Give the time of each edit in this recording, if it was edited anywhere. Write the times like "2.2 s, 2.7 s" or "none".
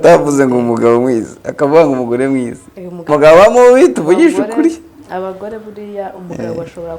3.1 s

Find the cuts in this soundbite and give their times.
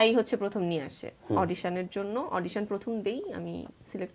none

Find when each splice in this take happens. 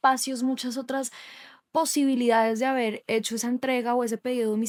none

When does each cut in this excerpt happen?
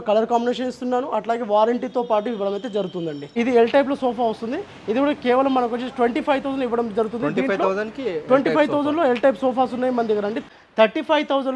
3.3 s, 10.5 s

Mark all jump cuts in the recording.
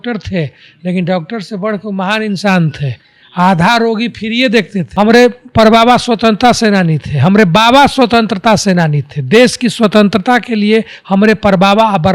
4.9 s

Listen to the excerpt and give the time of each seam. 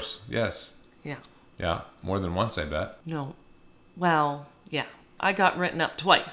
3.0 s, 5.0 s

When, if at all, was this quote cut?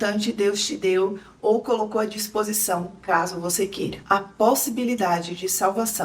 none

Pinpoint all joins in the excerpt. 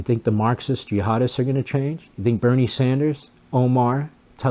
2.1 s, 3.3 s

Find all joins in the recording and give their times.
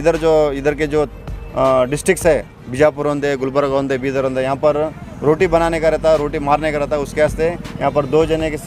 none

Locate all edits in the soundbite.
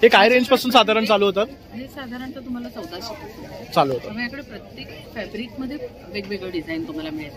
none

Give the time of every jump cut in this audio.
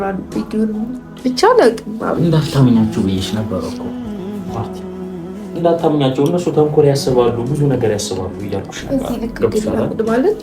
3.7 s, 5.5 s

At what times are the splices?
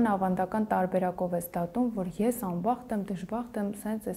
none

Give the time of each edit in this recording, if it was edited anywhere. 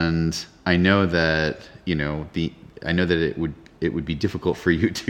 none

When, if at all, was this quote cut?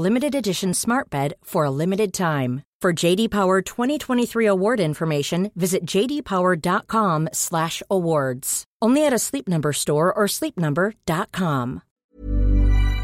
12.0 s

